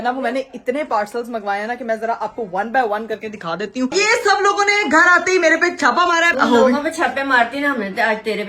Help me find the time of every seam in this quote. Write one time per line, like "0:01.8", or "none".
0:03.9
0:06.3